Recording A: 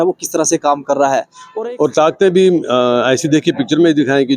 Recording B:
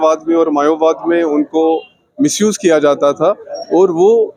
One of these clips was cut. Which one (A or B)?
A